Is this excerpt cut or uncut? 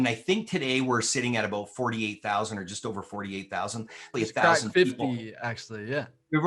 cut